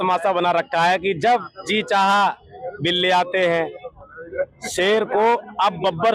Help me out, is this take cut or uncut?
uncut